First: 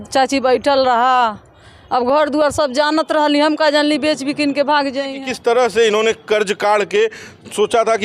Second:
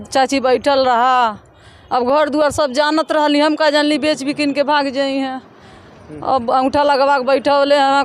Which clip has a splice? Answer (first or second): first